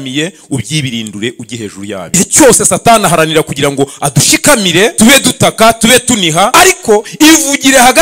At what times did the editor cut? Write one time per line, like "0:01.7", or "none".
0:02.1
0:04.9
0:06.5